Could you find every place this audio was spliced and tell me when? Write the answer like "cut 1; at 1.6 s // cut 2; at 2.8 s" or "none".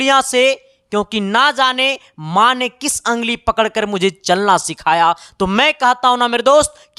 none